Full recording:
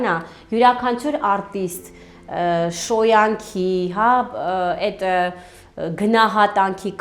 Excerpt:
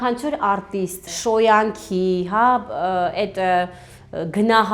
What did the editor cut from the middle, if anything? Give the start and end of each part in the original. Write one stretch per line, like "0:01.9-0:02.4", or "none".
0:01.9-0:02.8

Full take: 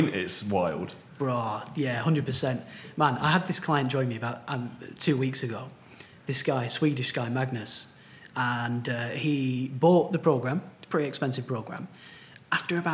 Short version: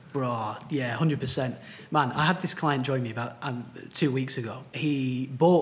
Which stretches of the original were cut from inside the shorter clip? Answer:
0:05.8-0:09.1

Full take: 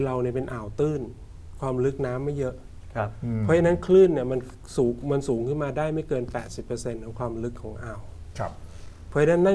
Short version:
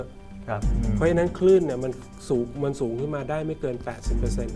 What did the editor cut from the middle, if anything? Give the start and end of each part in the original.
none

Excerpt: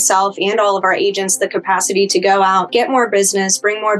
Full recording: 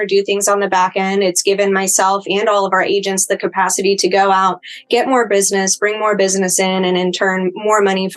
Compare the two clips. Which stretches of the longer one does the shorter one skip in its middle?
0:04.5-0:04.8

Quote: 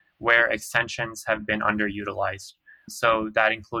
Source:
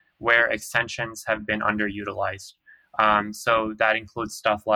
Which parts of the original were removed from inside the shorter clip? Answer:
0:02.9-0:03.3

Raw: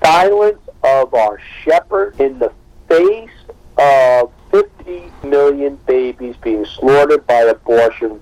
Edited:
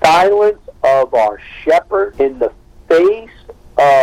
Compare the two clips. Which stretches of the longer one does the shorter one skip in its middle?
none

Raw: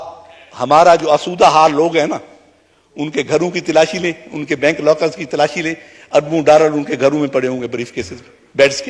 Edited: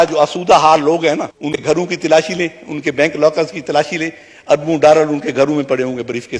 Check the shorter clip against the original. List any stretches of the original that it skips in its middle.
0:02.5-0:03.3

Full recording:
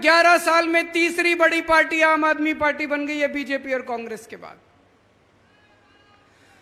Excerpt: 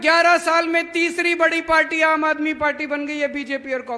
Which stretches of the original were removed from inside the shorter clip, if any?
none

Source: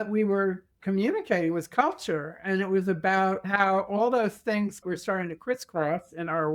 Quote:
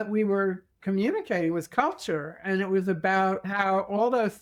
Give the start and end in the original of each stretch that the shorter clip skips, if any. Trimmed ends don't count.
none

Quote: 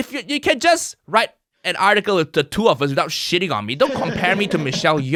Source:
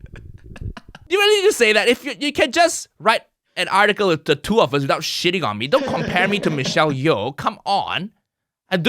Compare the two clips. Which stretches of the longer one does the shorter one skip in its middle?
none

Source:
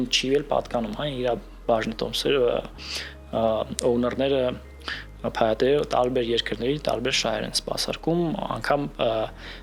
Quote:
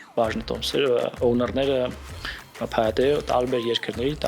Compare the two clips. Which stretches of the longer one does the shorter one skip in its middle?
0:02.7-0:03.8

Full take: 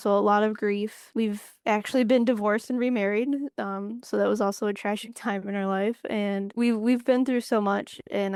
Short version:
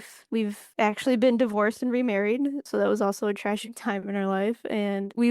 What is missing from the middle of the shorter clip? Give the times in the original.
0:03.5-0:04.0

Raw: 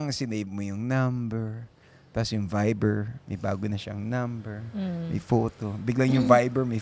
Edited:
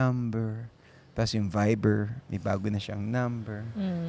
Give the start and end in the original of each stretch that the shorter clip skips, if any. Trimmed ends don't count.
none

